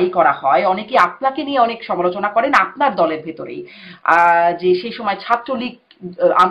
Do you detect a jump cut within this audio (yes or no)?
no